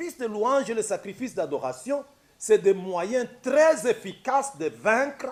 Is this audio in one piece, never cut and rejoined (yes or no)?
yes